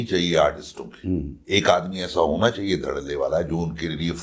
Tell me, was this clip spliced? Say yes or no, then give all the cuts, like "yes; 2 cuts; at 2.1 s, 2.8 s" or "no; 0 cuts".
yes; 1 cut; at 1.3 s